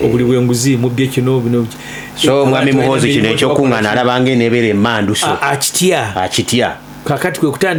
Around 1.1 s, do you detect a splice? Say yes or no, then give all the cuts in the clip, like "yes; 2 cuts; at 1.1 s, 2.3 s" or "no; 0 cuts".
no; 0 cuts